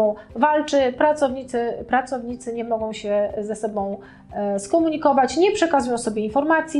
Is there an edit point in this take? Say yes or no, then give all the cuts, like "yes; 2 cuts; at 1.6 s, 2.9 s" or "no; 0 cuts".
no; 0 cuts